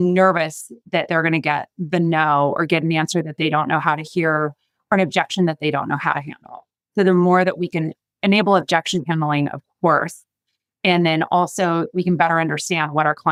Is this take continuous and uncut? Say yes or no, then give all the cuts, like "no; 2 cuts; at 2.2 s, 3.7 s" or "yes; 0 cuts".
yes; 0 cuts